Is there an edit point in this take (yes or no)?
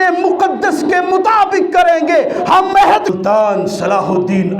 yes